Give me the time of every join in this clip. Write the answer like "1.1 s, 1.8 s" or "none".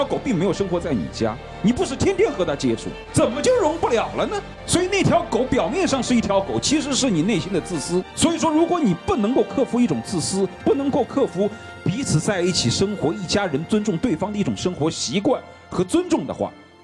none